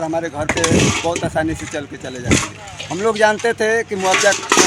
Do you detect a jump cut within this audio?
no; 0 cuts

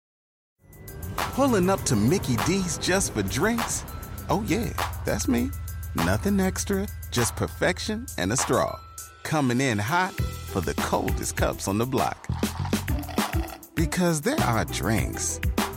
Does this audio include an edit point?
no; 0 cuts

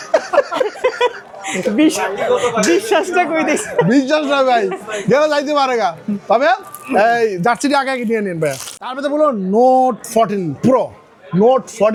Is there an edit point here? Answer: no; 0 cuts

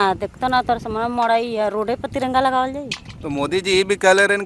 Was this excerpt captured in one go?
yes; 0 cuts

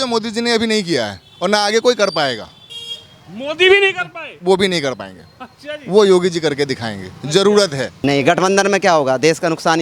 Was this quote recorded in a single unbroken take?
no; 1 cut; at 7.9 s

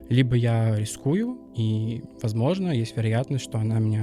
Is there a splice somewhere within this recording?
yes; 1 cut; at 1.5 s

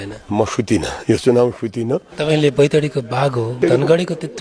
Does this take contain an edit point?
yes; 2 cuts; at 2.1 s, 3.6 s

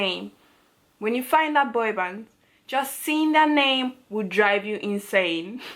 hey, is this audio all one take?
yes; 0 cuts

